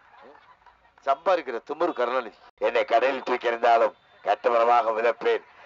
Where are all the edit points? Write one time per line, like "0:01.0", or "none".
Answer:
0:02.5